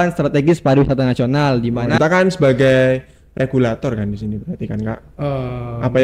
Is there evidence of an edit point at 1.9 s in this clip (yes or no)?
yes